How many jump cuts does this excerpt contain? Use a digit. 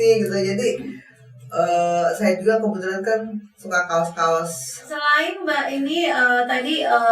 1